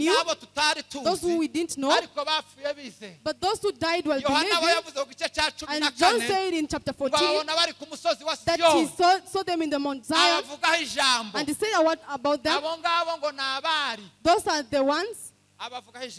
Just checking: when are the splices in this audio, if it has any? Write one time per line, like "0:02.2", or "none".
none